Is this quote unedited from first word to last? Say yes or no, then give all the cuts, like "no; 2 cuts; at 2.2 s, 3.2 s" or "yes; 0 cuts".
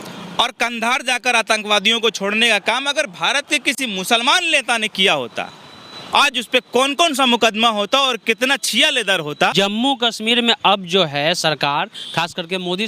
no; 1 cut; at 9.5 s